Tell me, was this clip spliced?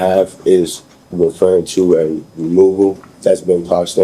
yes; 1 cut; at 3.1 s

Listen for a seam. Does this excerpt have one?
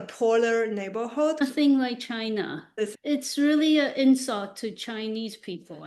yes; 2 cuts; at 1.4 s, 2.7 s

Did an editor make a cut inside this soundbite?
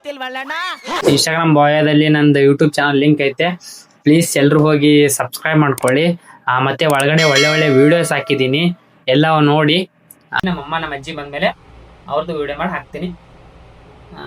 yes; 2 cuts; at 0.9 s, 10.4 s

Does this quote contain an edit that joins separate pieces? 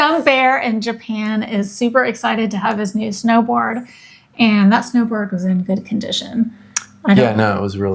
no; 0 cuts

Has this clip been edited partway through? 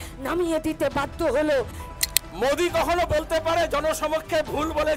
yes; 1 cut; at 1.8 s

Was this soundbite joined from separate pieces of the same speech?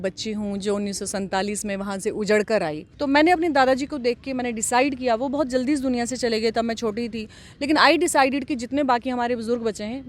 yes; 1 cut; at 2.9 s

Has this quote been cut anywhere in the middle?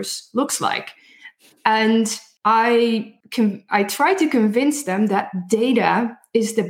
yes; 2 cuts; at 2.2 s, 3.2 s

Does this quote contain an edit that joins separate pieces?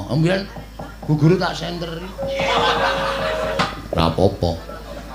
yes; 1 cut; at 3.6 s

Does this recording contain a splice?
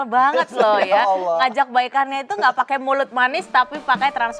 no; 0 cuts

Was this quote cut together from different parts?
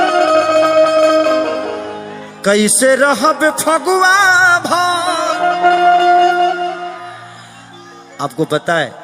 no; 0 cuts

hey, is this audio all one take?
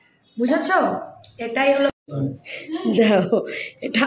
no; 1 cut; at 1.9 s

